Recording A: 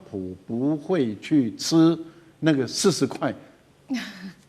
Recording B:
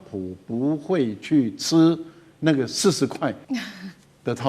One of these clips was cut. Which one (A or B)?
B